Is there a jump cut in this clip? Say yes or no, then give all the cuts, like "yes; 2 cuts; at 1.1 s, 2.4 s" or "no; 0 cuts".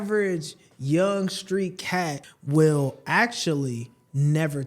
yes; 1 cut; at 2.2 s